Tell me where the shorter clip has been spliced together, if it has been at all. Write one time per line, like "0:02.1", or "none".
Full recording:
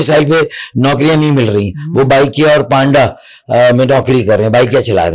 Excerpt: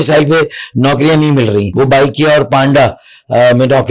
0:01.7